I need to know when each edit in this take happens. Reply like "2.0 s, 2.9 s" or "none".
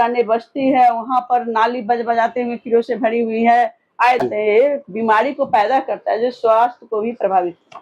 4.2 s

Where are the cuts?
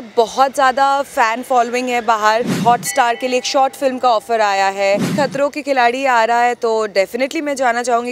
2.6 s, 5.1 s

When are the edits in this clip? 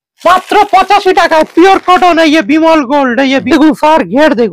3.4 s

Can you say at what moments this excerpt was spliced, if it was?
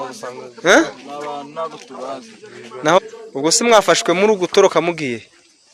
3.0 s

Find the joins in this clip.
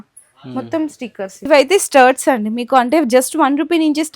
1.5 s

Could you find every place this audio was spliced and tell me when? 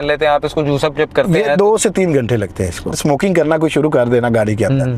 3.0 s

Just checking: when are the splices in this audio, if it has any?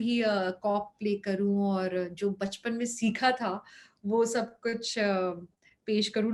none

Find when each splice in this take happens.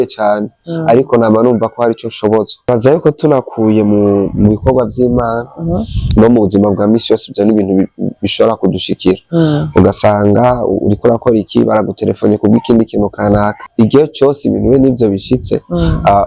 2.7 s, 13.6 s

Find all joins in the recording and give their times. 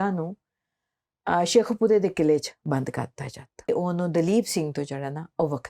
3.7 s

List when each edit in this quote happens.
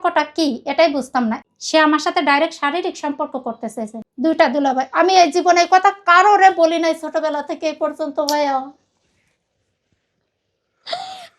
1.4 s, 4.0 s

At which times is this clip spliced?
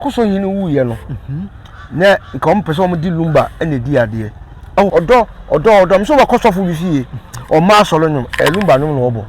4.9 s

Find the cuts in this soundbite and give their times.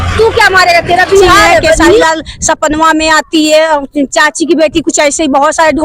2.0 s

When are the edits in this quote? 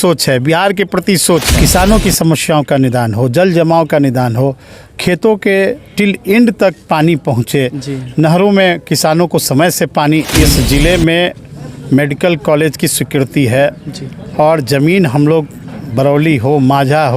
1.5 s, 10.3 s

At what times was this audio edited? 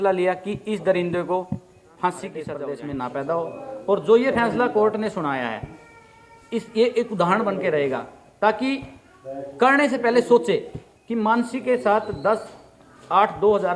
2.5 s

